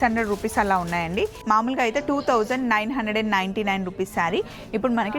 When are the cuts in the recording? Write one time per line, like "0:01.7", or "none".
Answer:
0:01.4

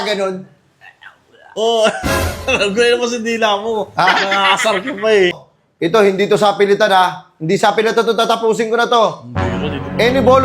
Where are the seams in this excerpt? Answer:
0:05.5

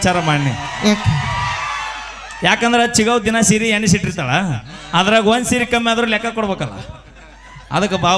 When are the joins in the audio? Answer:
none

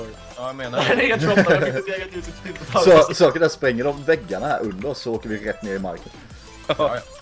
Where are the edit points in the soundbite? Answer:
none

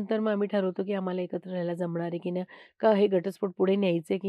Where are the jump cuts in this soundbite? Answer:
none

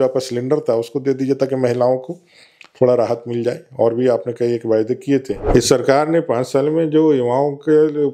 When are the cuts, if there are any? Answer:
0:05.4

